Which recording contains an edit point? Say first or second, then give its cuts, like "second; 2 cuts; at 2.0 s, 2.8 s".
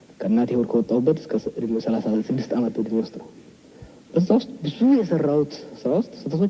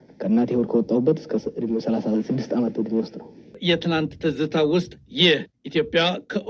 second; 1 cut; at 3.6 s